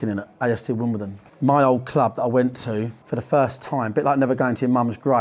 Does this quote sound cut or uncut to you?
cut